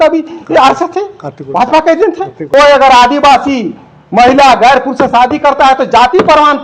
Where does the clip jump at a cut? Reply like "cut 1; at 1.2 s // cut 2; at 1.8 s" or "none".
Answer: cut 1; at 2.4 s